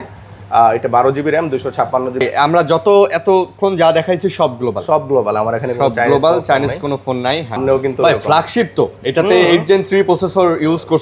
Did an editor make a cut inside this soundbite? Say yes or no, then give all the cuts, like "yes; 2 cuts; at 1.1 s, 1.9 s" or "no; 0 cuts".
yes; 2 cuts; at 2.2 s, 7.6 s